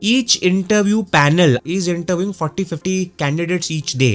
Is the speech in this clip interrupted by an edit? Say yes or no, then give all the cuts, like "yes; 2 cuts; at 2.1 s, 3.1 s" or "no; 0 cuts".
yes; 1 cut; at 1.6 s